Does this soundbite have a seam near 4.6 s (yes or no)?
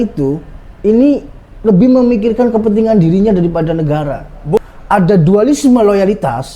yes